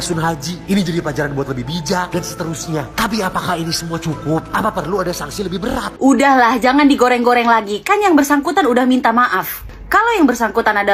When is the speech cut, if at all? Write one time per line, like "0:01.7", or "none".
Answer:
0:05.9